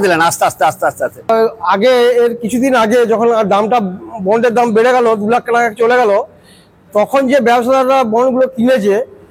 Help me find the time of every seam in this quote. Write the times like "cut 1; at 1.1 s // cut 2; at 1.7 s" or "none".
cut 1; at 1.3 s